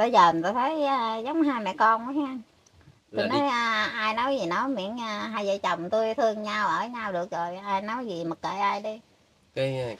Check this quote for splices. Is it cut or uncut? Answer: uncut